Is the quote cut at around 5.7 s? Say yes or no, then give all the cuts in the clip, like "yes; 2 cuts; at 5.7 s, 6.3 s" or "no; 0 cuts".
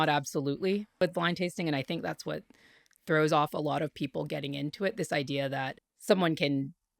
no; 1 cut; at 1.0 s